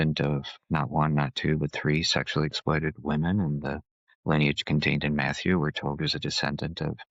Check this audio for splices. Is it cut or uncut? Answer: uncut